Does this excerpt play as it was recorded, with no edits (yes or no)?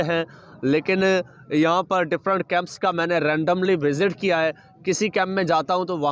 yes